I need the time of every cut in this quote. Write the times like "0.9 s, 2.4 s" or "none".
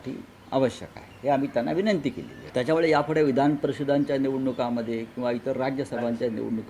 2.3 s